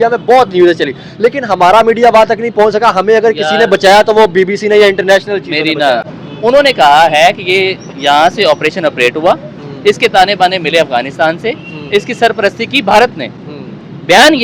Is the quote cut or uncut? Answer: cut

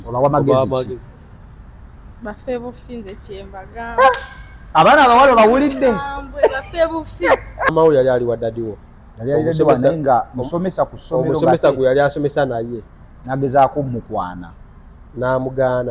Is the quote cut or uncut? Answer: cut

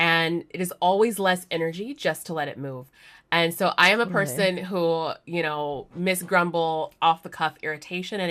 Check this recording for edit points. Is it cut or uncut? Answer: uncut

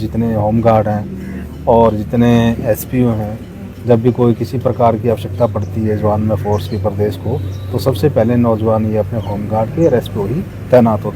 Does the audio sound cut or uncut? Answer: uncut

